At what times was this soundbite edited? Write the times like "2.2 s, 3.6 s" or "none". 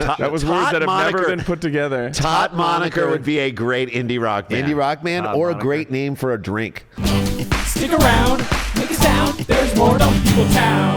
6.9 s